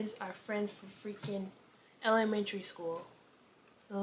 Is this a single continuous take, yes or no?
yes